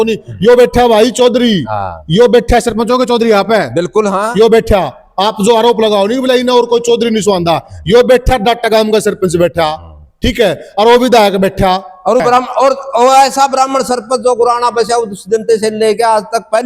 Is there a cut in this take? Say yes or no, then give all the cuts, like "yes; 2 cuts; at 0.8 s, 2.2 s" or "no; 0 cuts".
yes; 1 cut; at 12.2 s